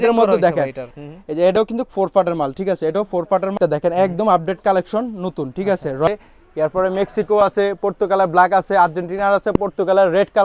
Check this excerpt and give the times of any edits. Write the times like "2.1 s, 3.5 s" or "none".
0.9 s, 3.6 s, 6.1 s